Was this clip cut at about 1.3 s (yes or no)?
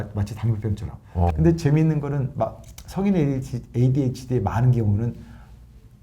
yes